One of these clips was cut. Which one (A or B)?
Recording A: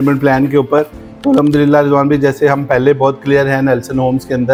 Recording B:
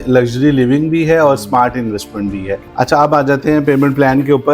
B